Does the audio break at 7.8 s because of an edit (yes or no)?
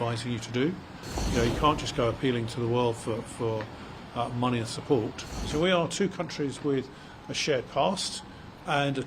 no